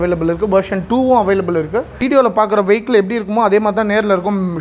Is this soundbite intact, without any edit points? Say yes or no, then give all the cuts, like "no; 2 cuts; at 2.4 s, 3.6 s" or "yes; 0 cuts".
no; 1 cut; at 1.9 s